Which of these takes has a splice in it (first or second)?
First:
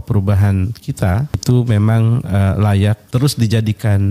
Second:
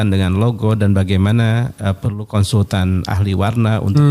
first